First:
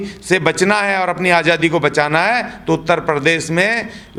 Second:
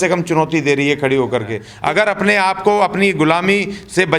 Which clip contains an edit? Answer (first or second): second